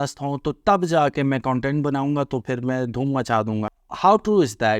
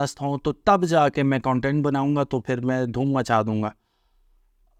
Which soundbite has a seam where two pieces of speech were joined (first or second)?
first